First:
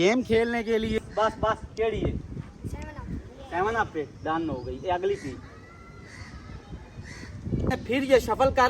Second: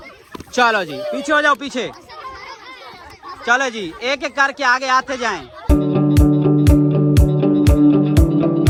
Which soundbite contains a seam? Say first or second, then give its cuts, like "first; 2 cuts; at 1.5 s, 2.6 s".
first; 2 cuts; at 1.0 s, 7.8 s